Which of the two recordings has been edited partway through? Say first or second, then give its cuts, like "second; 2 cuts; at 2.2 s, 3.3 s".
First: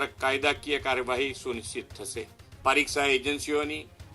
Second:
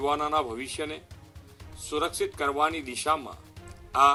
first; 1 cut; at 2.4 s